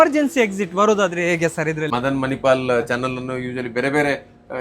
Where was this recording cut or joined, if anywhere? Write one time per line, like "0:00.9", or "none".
0:02.0

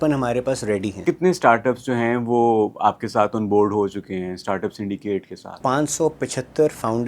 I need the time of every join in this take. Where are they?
0:01.0
0:05.4

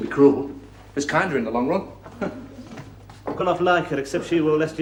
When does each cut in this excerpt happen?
none

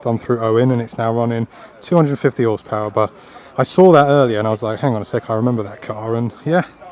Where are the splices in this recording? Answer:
none

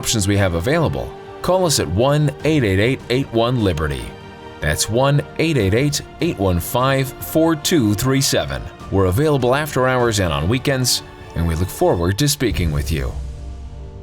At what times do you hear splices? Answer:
0:13.1

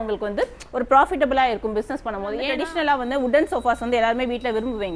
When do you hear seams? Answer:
0:02.5

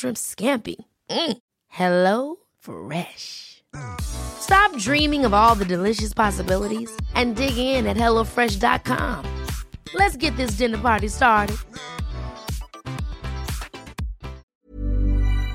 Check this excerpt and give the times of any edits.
0:14.4

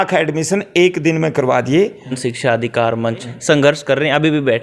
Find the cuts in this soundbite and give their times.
0:02.3
0:03.3

